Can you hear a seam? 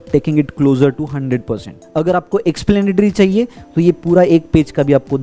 yes; 1 cut; at 1.7 s

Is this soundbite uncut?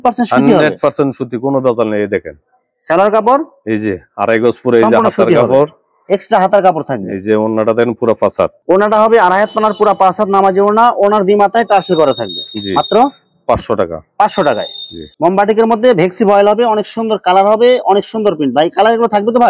yes; 0 cuts

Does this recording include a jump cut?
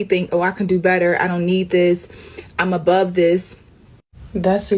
yes; 1 cut; at 1.1 s

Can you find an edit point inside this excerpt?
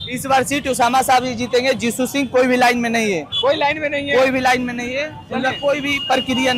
no; 0 cuts

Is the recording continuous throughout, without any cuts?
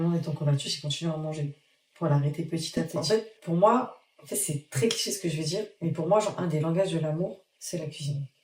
no; 1 cut; at 2.9 s

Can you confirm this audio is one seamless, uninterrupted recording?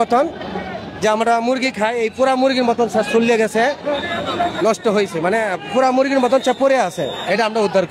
yes; 0 cuts

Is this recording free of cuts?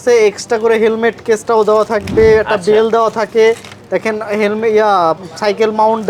yes; 0 cuts

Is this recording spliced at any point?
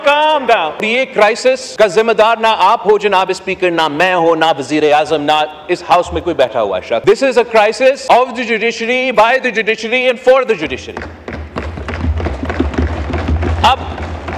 yes; 4 cuts; at 0.9 s, 1.7 s, 7.0 s, 8.0 s

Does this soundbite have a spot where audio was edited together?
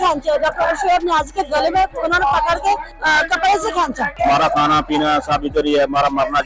yes; 2 cuts; at 2.9 s, 4.2 s

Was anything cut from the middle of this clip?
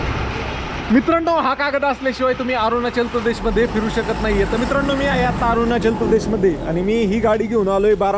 no; 0 cuts

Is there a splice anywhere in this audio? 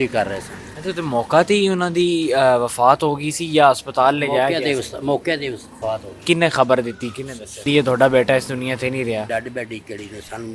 yes; 3 cuts; at 6.2 s, 7.6 s, 9.3 s

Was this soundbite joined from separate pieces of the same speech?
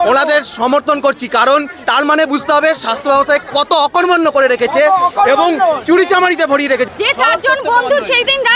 yes; 1 cut; at 6.9 s

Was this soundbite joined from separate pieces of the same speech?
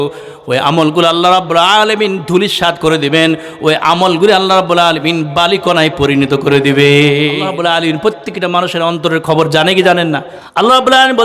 yes; 2 cuts; at 7.4 s, 10.4 s

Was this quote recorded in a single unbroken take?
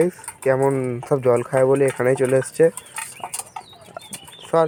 yes; 0 cuts

